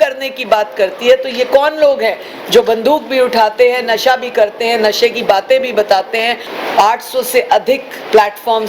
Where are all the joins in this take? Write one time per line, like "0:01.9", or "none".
0:06.4